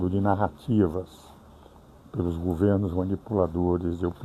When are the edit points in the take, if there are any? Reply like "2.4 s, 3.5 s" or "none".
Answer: none